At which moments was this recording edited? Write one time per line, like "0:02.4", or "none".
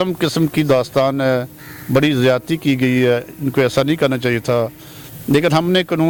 none